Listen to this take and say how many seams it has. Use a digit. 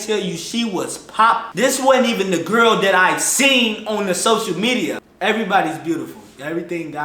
2